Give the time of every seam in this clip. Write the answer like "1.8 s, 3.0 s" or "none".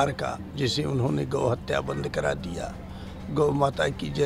none